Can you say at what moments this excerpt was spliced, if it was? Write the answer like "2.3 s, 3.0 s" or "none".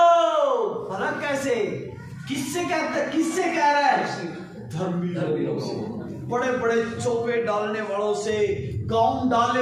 none